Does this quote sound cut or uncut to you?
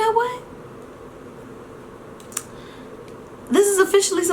uncut